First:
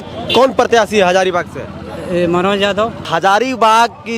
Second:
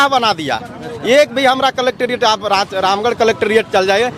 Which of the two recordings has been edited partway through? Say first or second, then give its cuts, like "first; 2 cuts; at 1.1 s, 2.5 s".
first; 1 cut; at 3.1 s